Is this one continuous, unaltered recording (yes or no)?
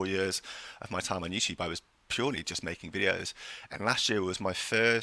yes